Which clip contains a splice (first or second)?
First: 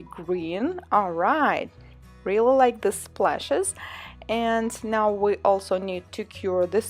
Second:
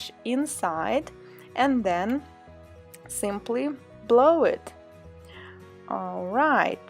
second